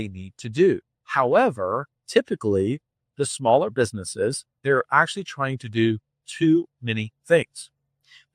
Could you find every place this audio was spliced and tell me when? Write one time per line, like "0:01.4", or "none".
0:01.0
0:01.9
0:04.6